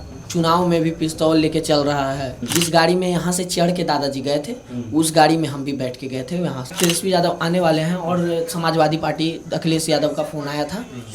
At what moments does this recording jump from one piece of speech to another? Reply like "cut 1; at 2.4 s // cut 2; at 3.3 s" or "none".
cut 1; at 2.3 s // cut 2; at 6.7 s